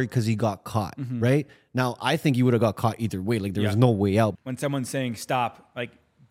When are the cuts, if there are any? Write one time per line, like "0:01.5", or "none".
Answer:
0:04.3